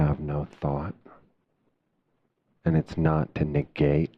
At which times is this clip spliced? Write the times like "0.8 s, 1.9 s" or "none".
2.5 s